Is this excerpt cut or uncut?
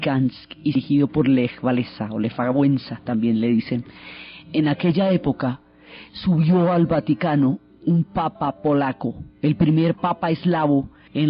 uncut